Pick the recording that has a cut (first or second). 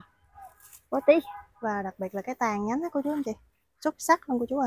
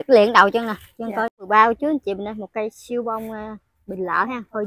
second